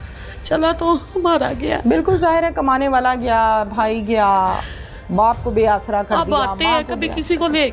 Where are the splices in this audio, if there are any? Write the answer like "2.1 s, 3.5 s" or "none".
none